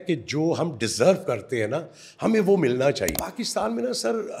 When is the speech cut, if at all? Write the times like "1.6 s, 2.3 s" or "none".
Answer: 3.3 s